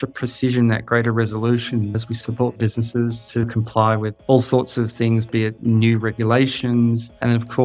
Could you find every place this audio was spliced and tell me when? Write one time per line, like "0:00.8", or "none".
0:04.1
0:05.6